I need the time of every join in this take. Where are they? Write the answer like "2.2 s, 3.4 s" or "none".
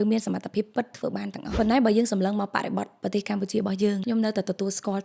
1.6 s, 4.0 s